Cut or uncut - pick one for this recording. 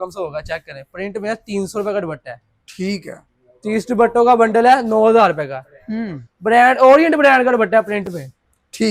uncut